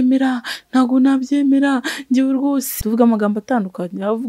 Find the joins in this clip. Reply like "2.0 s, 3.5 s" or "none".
2.7 s